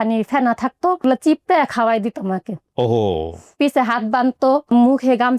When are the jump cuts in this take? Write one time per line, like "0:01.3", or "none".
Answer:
0:01.0
0:03.5
0:04.7